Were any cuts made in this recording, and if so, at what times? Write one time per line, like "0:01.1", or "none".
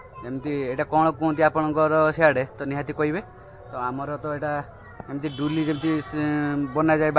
none